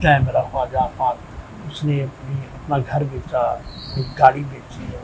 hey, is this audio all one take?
yes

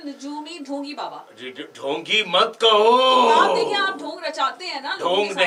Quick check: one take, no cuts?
yes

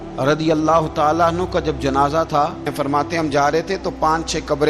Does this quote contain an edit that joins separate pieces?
yes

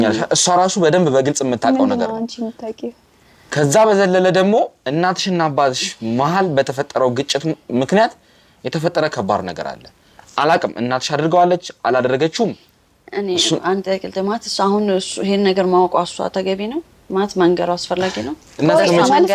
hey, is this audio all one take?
yes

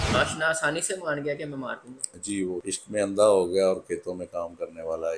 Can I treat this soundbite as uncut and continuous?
no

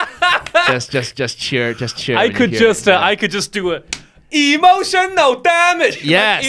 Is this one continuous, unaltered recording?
yes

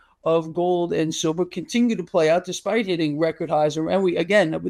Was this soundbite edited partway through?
no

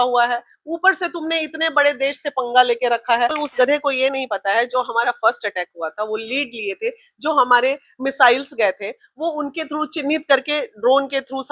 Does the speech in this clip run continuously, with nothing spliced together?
no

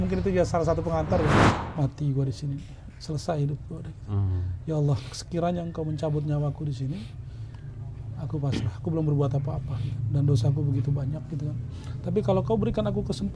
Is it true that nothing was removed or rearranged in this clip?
no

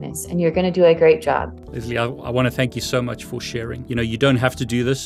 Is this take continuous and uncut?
yes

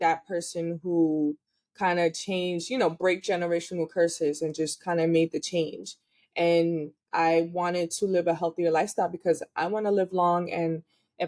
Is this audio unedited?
yes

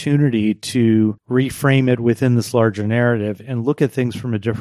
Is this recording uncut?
no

